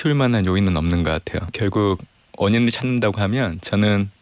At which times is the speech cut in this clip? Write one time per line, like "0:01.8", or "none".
0:01.5